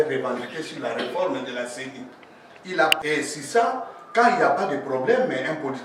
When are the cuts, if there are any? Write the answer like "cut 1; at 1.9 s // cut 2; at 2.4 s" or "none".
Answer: cut 1; at 3.0 s